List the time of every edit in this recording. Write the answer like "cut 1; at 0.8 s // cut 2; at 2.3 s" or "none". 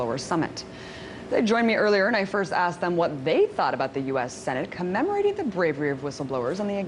cut 1; at 1.8 s